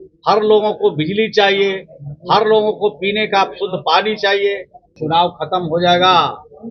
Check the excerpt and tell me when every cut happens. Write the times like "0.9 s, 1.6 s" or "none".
4.9 s